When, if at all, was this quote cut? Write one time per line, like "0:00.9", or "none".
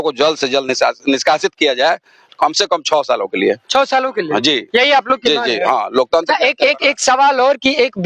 none